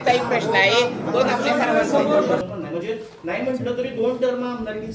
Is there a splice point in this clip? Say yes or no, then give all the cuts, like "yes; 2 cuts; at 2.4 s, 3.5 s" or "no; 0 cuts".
yes; 1 cut; at 2.4 s